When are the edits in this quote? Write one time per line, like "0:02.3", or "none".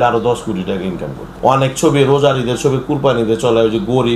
0:01.2